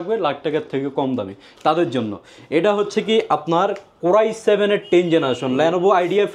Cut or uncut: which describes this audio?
uncut